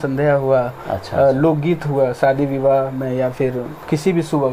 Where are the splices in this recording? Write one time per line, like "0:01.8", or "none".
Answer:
none